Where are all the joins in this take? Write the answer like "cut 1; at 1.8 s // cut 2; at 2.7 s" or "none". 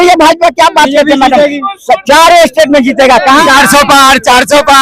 cut 1; at 3.5 s